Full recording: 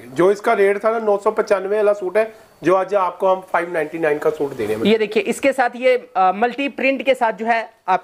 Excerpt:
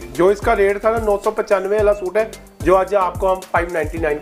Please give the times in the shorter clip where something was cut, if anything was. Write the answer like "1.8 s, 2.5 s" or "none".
none